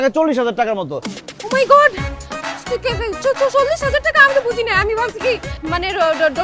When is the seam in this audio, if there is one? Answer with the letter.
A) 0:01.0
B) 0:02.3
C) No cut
A